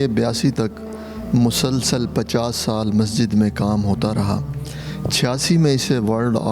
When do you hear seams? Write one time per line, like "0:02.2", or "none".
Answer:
none